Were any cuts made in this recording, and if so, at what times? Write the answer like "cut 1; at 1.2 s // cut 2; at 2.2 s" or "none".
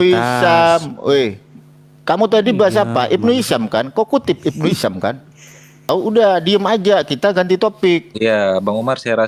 cut 1; at 5.8 s